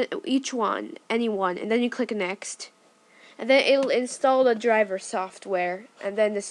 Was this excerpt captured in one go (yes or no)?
no